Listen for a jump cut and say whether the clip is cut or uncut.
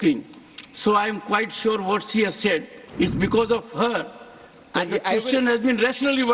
cut